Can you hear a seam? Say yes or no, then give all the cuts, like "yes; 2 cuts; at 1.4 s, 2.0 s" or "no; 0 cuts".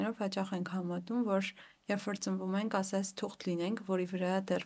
no; 0 cuts